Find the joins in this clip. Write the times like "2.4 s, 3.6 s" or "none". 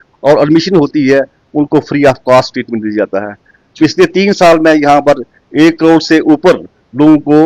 none